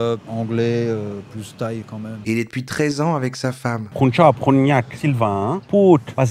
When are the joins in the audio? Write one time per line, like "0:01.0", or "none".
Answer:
0:02.2
0:03.8